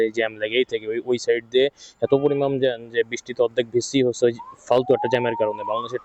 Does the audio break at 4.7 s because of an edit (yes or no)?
no